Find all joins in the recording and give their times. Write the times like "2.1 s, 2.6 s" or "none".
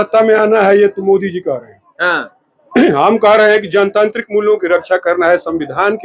none